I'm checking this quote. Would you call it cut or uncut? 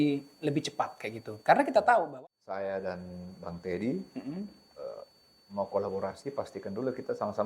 cut